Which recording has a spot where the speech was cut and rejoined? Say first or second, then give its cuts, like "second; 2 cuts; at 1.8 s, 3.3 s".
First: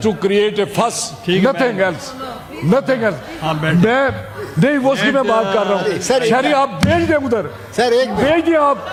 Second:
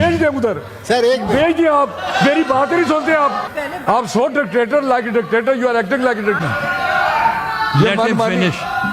second; 1 cut; at 3.5 s